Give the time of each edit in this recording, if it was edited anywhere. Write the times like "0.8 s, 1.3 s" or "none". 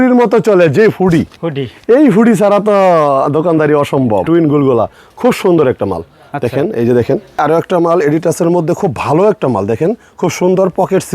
4.2 s, 7.4 s